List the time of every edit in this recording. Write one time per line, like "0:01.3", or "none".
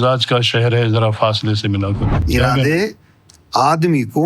0:02.1